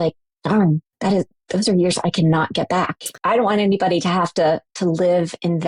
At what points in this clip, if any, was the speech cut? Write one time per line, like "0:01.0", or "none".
0:03.2